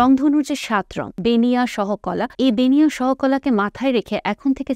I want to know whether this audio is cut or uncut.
cut